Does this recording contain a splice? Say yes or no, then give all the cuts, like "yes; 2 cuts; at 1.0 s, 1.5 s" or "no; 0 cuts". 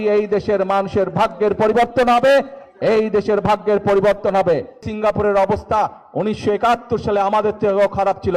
yes; 1 cut; at 4.9 s